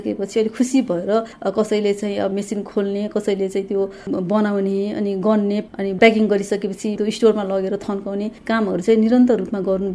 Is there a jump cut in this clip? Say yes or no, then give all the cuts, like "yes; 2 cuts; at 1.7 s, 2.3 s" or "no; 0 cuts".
yes; 4 cuts; at 1.3 s, 2.3 s, 5.6 s, 7.0 s